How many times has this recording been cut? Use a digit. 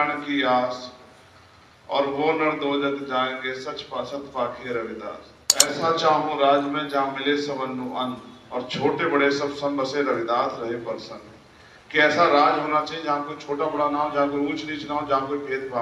1